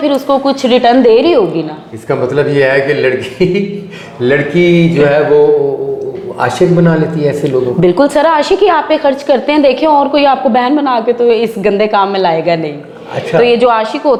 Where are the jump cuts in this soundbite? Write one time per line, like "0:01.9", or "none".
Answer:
none